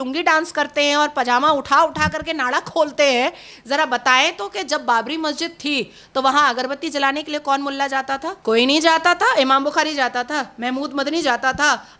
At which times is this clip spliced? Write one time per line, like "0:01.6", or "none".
0:08.3